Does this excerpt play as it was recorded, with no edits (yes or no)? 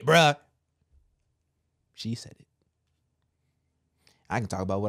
yes